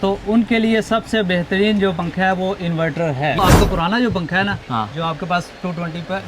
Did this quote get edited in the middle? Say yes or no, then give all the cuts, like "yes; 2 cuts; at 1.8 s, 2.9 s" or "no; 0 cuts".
yes; 1 cut; at 3.4 s